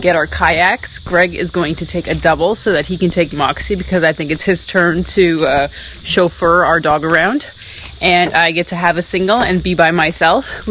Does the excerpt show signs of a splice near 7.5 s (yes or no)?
no